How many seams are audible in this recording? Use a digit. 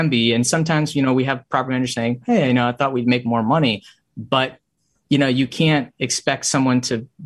0